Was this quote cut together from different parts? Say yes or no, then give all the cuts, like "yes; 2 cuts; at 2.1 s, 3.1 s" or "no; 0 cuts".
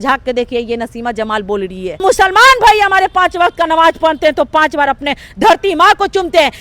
yes; 1 cut; at 2.0 s